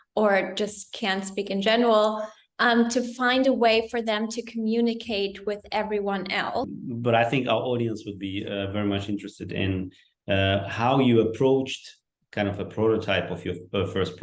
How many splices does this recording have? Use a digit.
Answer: 1